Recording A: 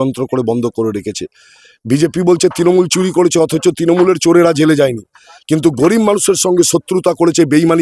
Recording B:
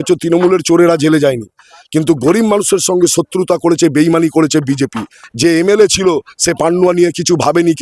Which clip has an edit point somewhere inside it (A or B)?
B